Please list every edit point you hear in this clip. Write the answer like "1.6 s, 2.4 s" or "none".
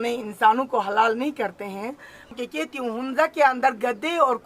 2.3 s